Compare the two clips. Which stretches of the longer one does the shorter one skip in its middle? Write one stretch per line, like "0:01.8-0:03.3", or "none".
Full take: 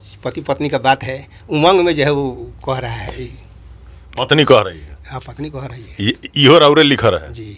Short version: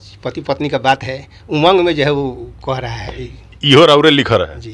0:03.5-0:06.3